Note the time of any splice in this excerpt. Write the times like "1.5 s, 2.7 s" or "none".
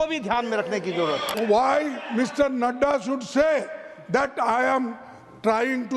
1.3 s